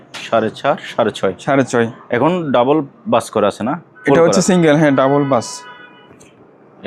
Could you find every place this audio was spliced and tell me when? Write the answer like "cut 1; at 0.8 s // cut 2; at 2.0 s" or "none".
none